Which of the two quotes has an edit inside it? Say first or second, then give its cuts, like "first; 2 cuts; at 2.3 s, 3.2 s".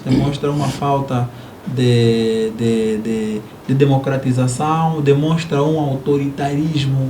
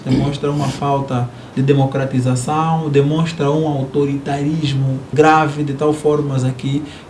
second; 2 cuts; at 1.4 s, 5.1 s